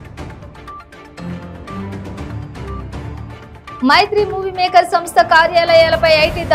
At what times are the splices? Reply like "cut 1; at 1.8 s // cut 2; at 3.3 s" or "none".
cut 1; at 3.1 s